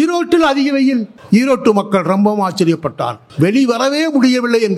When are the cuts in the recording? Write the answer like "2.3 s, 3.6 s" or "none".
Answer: 1.1 s, 3.2 s